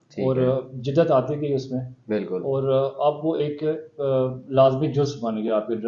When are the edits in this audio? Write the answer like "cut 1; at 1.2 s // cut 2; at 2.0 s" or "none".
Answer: none